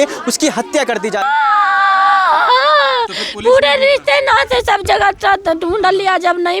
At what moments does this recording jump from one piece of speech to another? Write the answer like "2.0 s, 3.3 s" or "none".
1.2 s

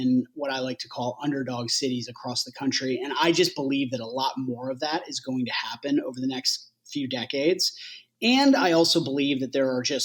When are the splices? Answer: none

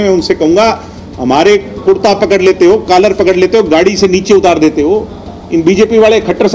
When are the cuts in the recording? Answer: none

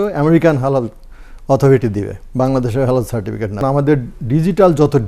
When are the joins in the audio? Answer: 3.6 s

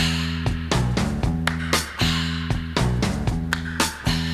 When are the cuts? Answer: none

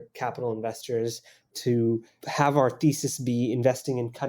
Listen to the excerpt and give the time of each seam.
2.2 s

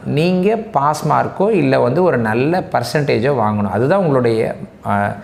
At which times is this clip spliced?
none

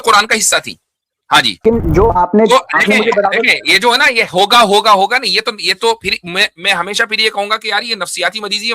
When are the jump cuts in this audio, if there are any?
1.6 s

